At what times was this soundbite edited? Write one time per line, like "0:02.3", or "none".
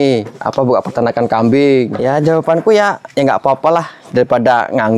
0:02.1